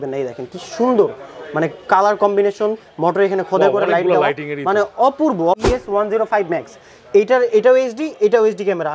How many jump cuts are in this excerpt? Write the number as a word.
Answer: one